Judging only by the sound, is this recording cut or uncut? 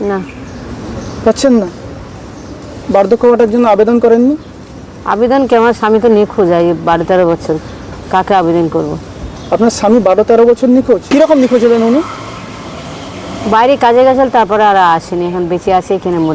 cut